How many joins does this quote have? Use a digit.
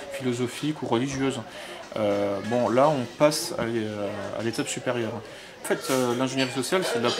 1